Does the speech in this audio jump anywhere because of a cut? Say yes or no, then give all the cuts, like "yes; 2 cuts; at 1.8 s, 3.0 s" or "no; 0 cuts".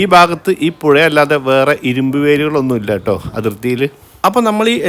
yes; 1 cut; at 4.0 s